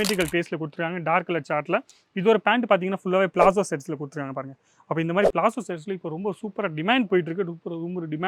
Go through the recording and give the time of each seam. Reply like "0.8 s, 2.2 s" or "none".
none